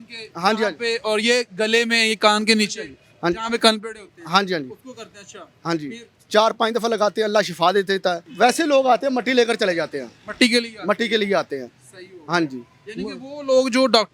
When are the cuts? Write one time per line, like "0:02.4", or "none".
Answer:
0:08.2